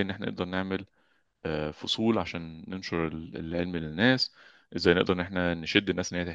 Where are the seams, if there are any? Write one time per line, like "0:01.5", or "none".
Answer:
none